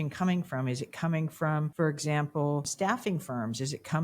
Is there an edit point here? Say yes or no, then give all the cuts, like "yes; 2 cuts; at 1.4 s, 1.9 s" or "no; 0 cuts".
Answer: yes; 2 cuts; at 1.7 s, 2.7 s